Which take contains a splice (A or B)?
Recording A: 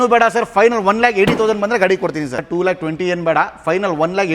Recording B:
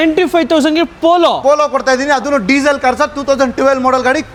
A